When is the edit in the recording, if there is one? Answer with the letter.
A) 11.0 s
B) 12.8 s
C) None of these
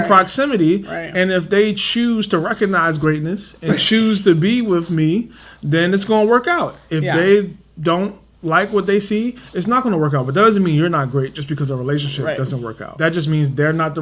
B